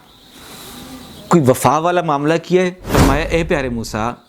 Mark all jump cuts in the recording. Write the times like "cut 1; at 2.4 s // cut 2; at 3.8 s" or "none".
cut 1; at 2.9 s